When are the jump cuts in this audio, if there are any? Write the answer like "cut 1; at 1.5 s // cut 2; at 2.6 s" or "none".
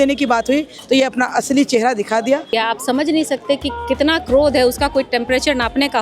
cut 1; at 2.5 s

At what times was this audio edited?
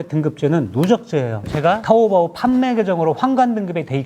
cut 1; at 1.4 s

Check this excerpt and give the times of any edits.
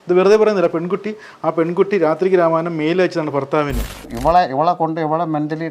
cut 1; at 4.1 s

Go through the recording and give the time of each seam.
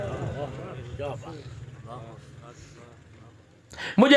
cut 1; at 3.0 s

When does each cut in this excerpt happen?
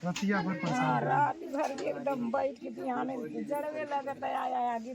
none

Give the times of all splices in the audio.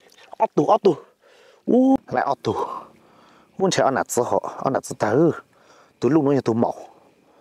cut 1; at 2.0 s

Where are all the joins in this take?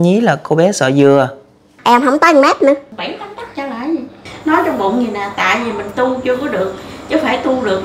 cut 1; at 1.7 s // cut 2; at 2.9 s // cut 3; at 4.3 s

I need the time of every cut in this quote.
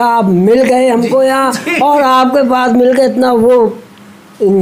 none

